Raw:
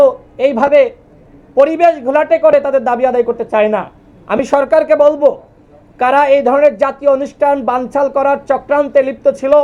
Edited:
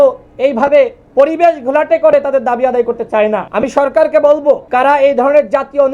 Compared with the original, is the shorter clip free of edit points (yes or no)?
no